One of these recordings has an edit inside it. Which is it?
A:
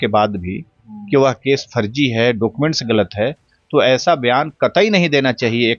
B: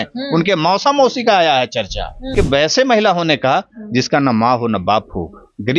B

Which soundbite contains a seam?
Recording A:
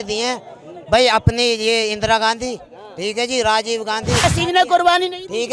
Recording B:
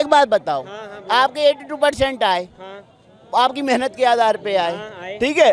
A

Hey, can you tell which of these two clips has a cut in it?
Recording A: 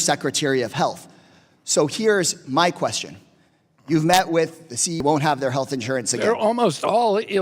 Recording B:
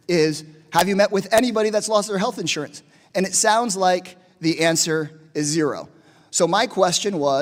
A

